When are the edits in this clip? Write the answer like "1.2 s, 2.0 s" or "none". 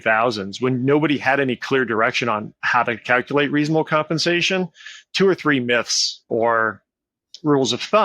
6.2 s